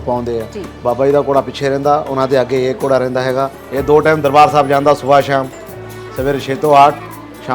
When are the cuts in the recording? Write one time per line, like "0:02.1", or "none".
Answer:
0:03.6